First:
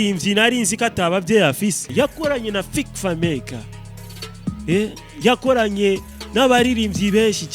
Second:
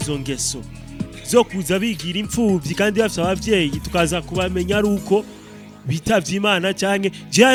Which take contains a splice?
first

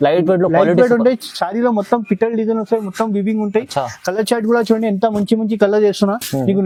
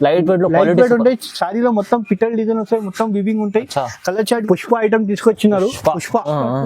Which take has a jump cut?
second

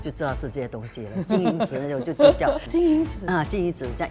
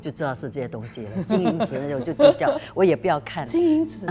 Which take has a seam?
first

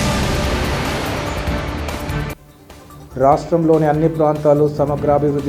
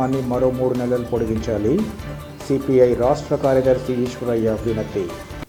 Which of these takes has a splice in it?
first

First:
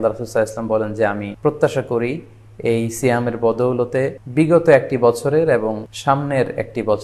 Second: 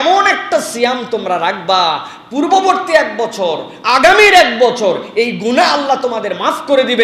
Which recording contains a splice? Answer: first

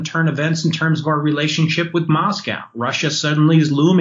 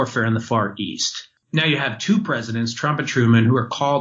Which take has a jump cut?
second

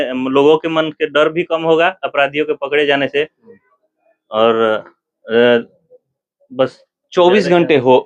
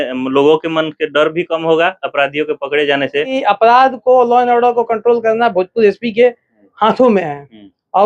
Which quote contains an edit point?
second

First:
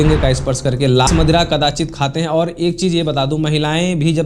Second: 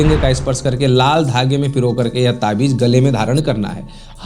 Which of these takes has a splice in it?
first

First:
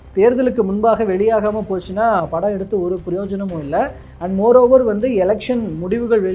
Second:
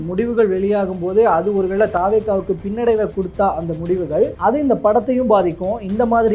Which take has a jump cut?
second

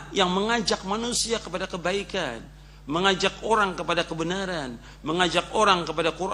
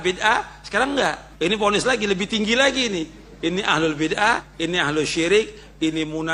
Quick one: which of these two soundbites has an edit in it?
second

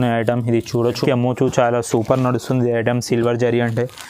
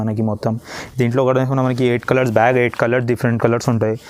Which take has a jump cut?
first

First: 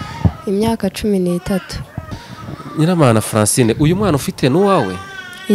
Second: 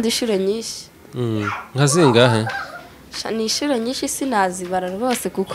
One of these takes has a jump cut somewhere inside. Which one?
first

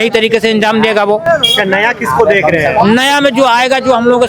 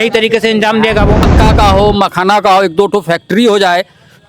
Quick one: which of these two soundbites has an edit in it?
second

